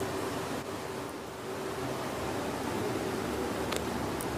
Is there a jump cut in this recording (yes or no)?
yes